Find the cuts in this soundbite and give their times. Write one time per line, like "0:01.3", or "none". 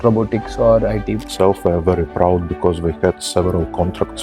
0:01.3